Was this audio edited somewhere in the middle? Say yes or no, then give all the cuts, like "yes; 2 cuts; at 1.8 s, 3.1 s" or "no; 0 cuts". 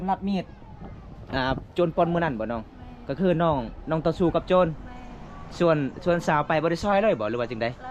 no; 0 cuts